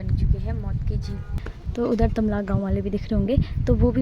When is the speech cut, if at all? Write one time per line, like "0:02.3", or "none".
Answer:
none